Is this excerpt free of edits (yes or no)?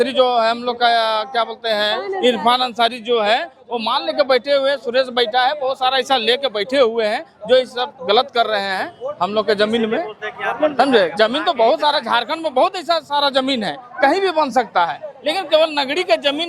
yes